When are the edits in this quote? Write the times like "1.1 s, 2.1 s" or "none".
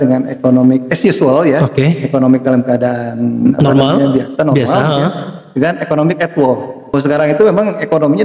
6.9 s

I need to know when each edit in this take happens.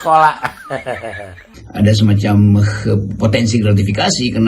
1.6 s

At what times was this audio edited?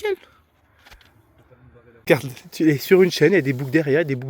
2.1 s

